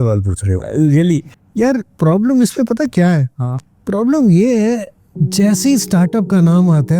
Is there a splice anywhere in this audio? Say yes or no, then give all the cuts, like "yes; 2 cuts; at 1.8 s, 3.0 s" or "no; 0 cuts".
yes; 1 cut; at 1.3 s